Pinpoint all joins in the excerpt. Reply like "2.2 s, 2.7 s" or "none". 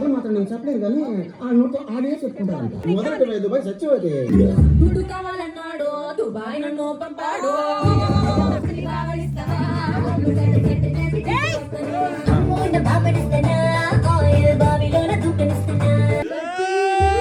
4.3 s, 8.7 s, 12.2 s, 16.3 s